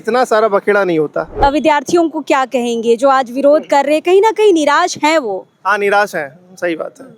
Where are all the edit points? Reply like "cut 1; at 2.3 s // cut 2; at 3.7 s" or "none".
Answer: cut 1; at 1.2 s